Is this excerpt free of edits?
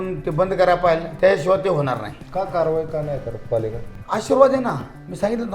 no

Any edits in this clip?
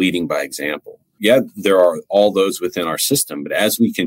yes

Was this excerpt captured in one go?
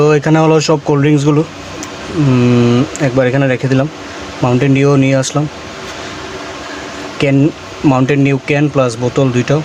yes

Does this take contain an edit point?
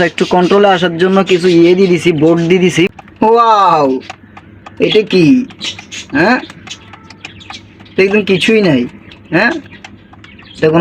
yes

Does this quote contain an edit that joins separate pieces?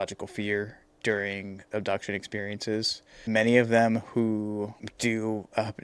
yes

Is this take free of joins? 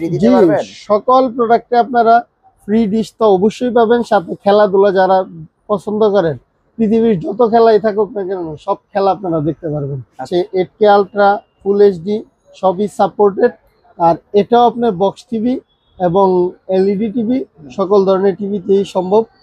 no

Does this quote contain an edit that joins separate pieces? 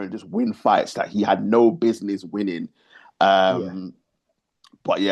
no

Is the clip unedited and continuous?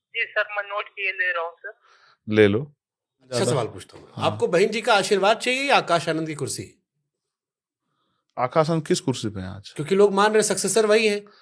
no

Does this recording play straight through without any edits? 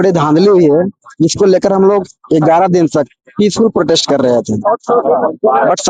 yes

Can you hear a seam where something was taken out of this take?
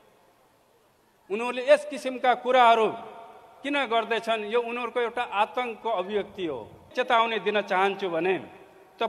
yes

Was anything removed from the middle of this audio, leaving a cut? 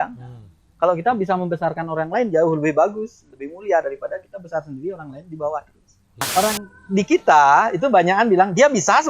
yes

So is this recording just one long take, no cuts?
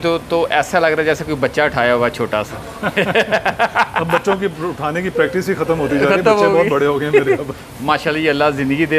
yes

